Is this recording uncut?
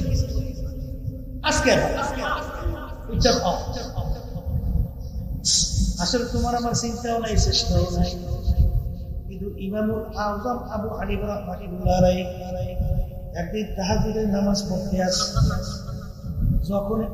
yes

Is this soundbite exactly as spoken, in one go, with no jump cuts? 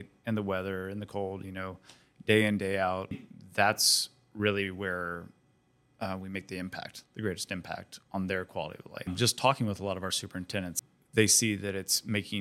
no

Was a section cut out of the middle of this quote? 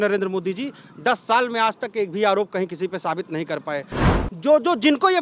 yes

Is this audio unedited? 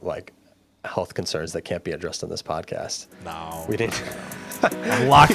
yes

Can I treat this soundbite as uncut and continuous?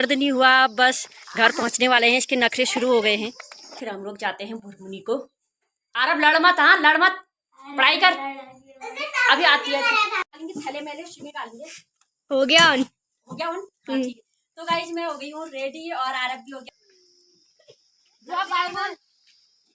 no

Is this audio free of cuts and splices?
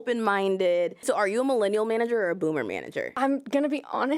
no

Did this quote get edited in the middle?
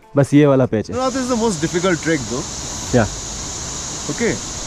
yes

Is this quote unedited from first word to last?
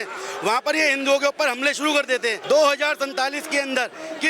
no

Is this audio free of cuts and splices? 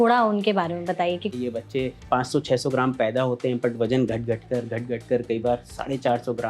no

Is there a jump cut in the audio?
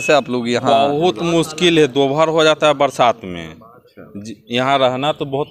no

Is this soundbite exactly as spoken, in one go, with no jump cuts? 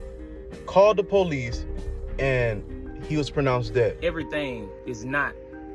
no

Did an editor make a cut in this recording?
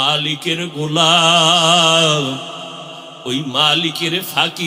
no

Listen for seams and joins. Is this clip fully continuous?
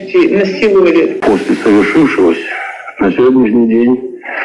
no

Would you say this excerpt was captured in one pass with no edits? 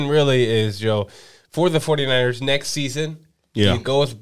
yes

